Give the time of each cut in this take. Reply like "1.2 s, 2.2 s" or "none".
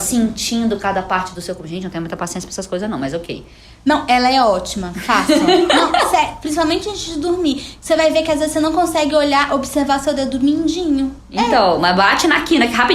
11.2 s